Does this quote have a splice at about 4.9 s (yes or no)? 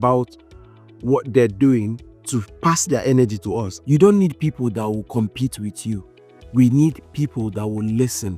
no